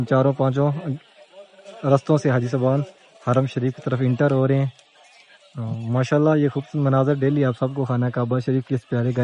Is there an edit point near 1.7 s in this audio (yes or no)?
no